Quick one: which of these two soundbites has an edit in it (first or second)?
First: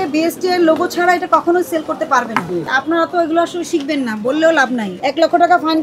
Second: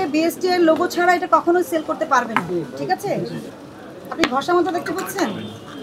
first